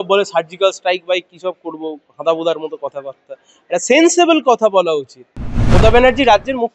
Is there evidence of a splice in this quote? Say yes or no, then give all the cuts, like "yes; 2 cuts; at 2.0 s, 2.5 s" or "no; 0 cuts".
yes; 1 cut; at 5.8 s